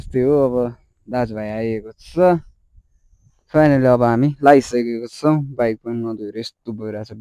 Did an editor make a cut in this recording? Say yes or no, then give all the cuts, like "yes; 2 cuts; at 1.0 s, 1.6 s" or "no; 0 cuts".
no; 0 cuts